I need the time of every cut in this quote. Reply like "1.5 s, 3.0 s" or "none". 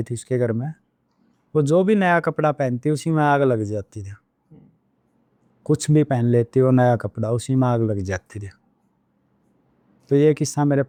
none